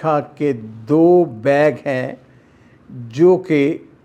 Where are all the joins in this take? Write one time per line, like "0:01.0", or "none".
none